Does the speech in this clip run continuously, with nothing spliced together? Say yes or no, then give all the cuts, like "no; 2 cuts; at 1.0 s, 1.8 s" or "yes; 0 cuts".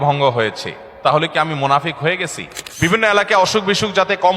no; 1 cut; at 2.9 s